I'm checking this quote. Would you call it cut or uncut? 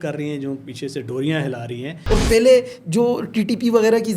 cut